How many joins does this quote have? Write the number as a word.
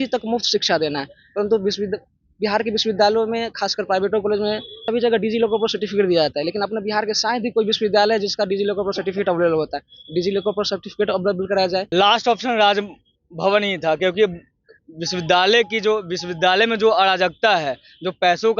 two